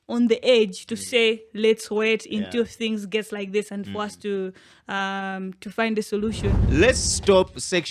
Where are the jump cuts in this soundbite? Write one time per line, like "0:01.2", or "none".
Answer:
0:06.6